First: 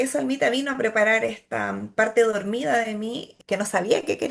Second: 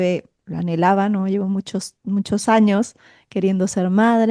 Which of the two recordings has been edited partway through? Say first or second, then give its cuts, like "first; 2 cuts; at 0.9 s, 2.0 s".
first; 1 cut; at 3.3 s